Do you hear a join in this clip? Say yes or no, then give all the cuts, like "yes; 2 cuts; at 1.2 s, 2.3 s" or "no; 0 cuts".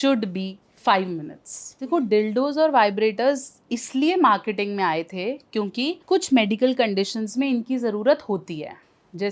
yes; 2 cuts; at 2.1 s, 6.0 s